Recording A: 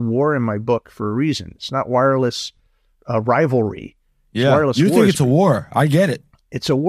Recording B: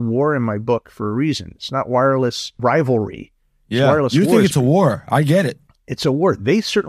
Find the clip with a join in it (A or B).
B